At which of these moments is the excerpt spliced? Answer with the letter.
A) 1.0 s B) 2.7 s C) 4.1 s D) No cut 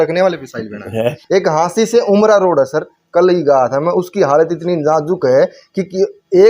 A